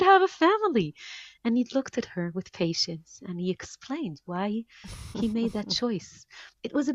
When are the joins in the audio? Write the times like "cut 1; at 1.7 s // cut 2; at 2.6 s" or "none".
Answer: none